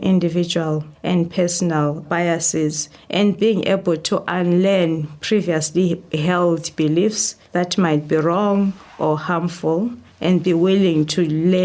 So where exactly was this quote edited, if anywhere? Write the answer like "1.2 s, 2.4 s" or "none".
none

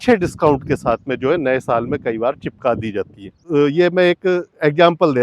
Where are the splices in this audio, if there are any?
3.4 s

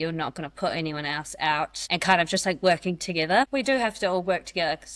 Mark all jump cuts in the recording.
3.5 s

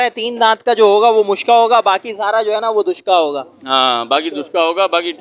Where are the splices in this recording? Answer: none

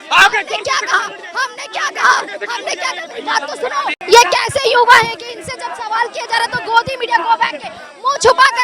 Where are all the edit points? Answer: 4.0 s

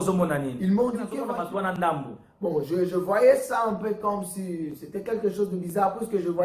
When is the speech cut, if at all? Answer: 1.2 s

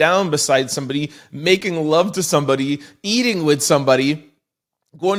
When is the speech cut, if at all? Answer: none

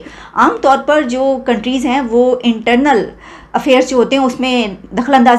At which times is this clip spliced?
none

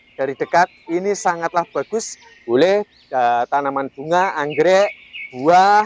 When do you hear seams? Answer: 2.2 s

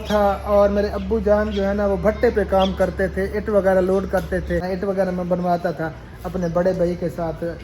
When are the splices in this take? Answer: 4.7 s

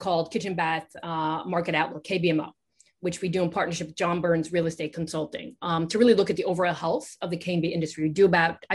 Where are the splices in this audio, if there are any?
none

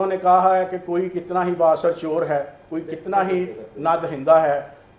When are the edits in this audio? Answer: none

